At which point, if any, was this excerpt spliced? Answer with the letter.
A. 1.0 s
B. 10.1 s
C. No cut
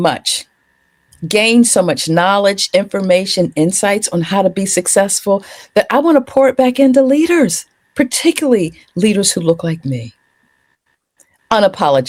C